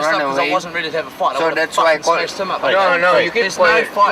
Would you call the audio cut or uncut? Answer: uncut